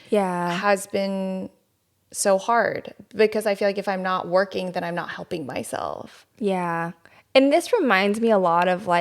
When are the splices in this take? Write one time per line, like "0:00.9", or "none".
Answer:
none